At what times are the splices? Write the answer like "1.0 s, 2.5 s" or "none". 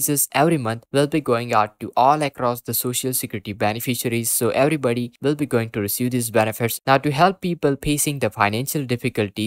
6.8 s